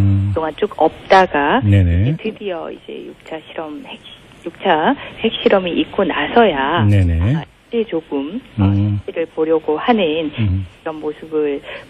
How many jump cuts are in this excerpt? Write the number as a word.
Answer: one